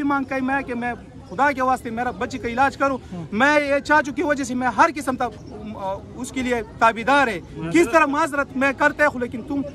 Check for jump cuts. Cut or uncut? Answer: uncut